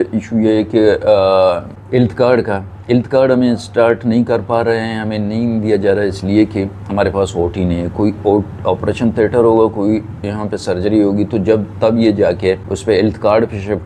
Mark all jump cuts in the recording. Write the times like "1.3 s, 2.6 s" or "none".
1.7 s, 12.7 s